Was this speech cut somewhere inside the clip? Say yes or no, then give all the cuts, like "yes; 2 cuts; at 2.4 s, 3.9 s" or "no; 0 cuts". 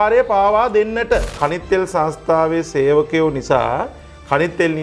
yes; 1 cut; at 1.3 s